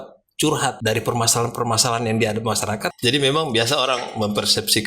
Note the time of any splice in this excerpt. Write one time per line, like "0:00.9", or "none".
0:00.8
0:02.9